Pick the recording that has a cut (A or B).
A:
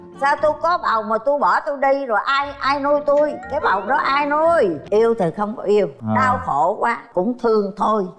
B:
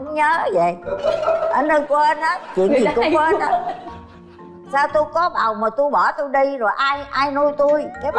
A